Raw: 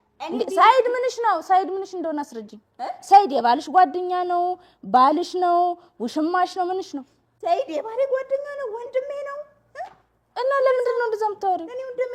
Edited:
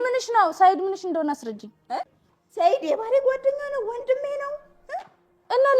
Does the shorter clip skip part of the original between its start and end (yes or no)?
yes